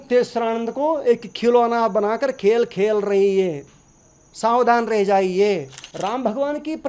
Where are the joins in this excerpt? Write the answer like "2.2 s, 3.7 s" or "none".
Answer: 5.8 s